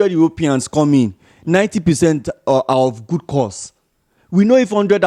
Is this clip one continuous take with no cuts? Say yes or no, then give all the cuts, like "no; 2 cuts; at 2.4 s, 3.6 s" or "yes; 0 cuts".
yes; 0 cuts